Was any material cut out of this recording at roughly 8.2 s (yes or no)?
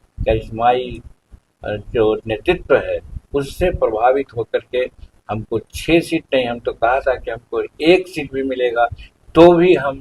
no